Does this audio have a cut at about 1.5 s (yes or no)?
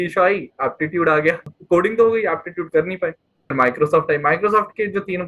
yes